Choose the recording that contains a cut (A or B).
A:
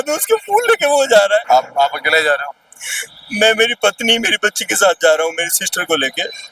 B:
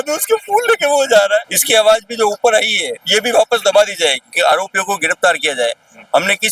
B